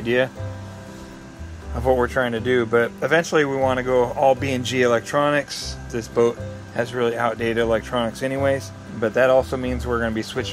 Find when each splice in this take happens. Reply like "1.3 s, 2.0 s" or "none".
6.0 s, 8.8 s